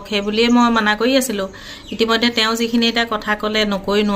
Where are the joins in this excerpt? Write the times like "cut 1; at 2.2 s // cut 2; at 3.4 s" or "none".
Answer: none